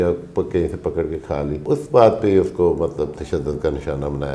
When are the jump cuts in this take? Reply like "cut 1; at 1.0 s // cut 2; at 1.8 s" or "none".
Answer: cut 1; at 1.7 s